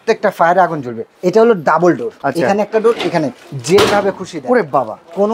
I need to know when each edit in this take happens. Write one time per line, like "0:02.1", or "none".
0:01.0
0:02.1